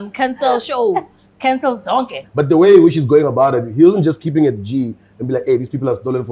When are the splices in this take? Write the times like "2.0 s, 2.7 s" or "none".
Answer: 2.2 s